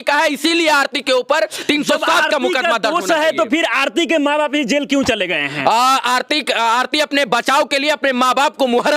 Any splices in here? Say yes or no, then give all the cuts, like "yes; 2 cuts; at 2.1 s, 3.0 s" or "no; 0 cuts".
no; 0 cuts